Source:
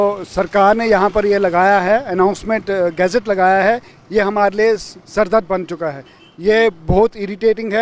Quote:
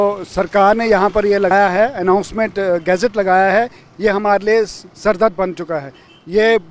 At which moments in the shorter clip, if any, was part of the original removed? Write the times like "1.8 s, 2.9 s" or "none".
1.5 s

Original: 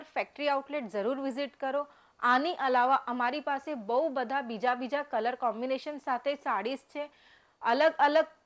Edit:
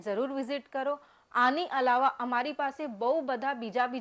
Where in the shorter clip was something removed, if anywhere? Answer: none

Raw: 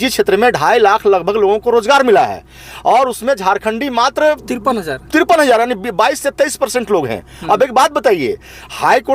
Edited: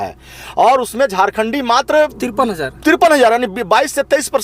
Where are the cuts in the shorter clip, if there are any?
none

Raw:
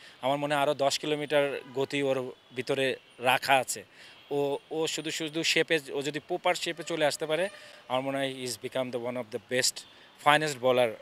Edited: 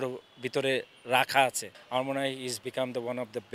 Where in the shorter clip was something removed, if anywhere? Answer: 1.7 s

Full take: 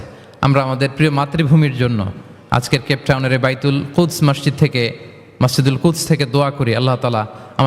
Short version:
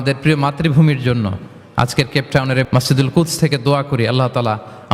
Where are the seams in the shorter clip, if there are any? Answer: 2.7 s

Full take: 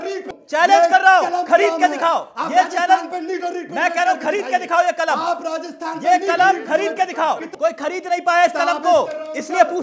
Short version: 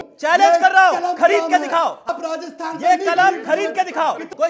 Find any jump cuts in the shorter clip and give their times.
2.1 s

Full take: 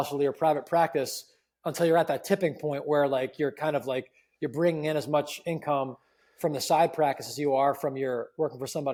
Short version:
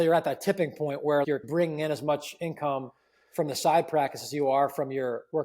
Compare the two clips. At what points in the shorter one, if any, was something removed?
1.3 s

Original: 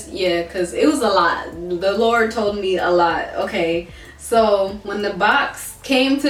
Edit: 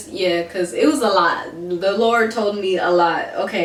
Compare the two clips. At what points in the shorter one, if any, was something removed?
none

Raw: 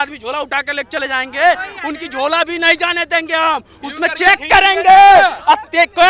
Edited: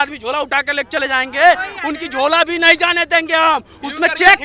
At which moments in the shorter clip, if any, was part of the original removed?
none

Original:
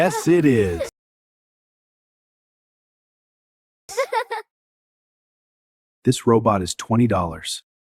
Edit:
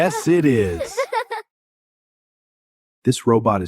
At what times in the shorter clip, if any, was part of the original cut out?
0.9 s

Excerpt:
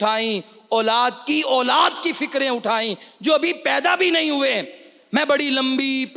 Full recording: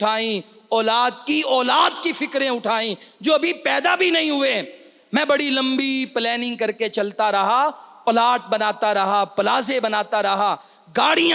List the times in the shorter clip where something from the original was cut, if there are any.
none

